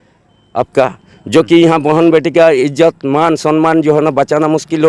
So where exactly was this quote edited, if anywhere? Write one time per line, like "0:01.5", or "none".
none